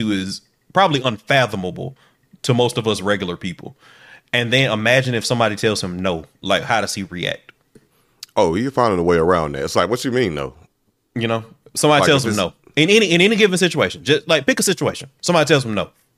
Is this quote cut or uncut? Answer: uncut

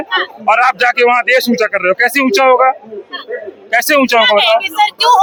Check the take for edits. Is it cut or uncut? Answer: uncut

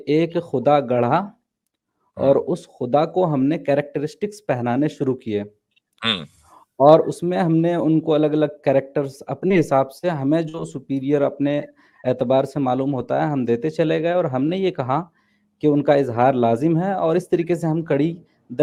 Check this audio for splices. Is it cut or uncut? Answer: uncut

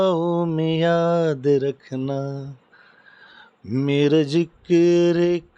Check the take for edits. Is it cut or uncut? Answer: uncut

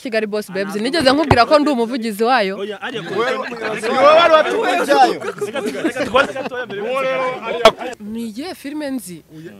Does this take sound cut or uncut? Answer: cut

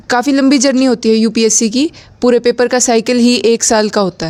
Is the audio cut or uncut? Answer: uncut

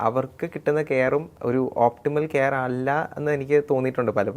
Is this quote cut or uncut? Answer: cut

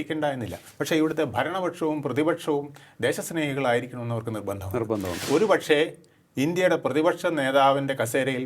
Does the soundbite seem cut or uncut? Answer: cut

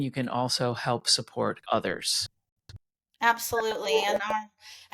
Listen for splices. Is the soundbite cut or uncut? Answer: uncut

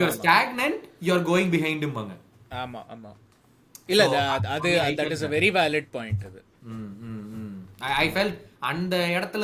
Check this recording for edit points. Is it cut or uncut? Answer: uncut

